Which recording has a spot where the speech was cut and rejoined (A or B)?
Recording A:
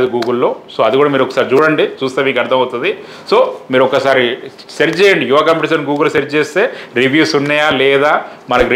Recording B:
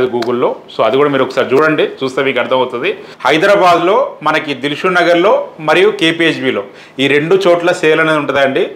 B